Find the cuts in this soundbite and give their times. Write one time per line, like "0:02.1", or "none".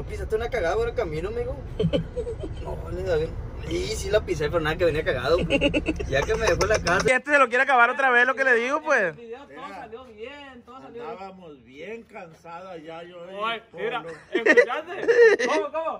0:07.1